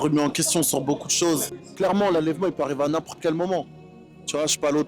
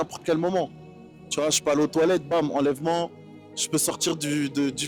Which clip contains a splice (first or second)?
first